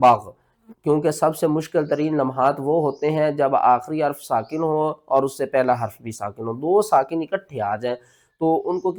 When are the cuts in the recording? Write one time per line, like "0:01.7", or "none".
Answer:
none